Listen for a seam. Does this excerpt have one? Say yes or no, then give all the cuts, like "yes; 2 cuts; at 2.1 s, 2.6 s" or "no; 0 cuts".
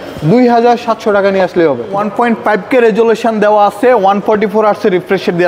yes; 1 cut; at 2.0 s